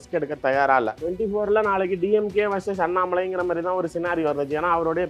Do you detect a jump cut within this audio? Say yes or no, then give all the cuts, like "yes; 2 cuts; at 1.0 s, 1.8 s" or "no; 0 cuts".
yes; 1 cut; at 1.0 s